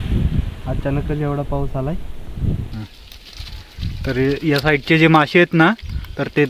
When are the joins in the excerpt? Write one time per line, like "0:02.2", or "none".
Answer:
0:02.7